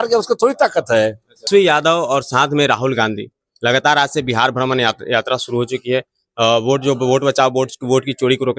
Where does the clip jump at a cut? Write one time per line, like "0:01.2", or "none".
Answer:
0:01.5